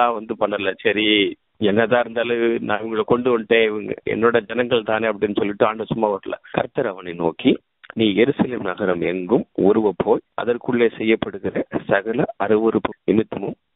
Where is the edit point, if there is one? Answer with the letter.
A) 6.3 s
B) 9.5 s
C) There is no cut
A